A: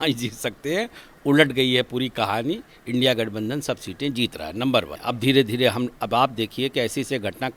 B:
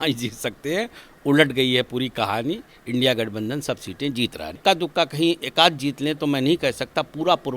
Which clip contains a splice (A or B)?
B